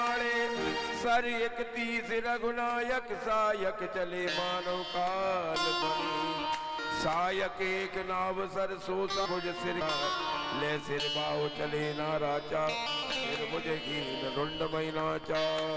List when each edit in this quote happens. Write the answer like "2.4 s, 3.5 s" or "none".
none